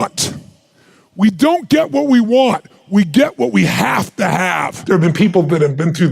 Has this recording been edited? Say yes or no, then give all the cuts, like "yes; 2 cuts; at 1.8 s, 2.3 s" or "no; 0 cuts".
yes; 1 cut; at 4.7 s